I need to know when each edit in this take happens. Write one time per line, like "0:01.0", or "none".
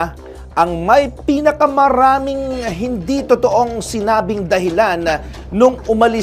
none